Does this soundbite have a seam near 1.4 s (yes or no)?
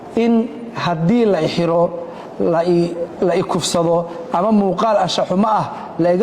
no